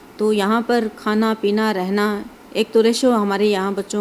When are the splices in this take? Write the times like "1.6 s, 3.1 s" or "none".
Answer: none